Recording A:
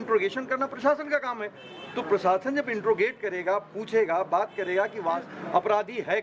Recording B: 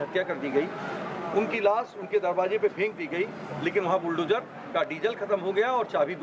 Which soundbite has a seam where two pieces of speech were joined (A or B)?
A